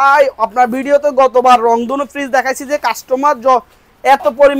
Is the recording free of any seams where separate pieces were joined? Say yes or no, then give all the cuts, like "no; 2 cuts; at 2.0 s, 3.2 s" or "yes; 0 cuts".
yes; 0 cuts